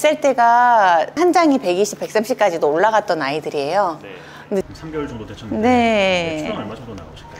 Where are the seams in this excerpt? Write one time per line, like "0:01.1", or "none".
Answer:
0:04.7